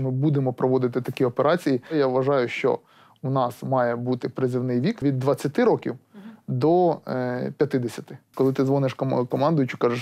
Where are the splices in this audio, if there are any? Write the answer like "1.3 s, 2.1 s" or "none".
1.9 s, 5.0 s, 8.3 s

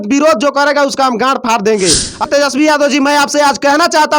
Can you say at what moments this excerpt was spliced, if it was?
2.3 s

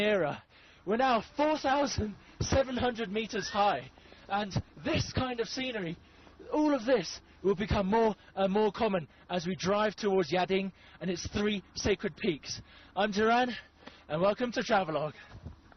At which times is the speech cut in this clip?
3.6 s

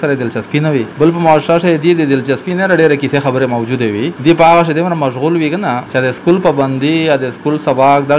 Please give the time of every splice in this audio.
0.9 s, 4.1 s, 5.8 s

